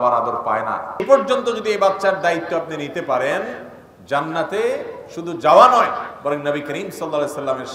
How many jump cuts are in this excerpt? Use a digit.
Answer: 1